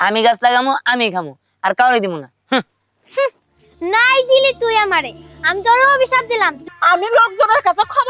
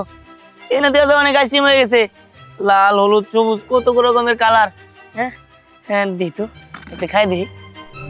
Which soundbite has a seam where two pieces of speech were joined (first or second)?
first